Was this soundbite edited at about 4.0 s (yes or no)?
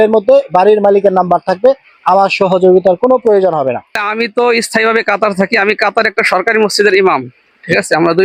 yes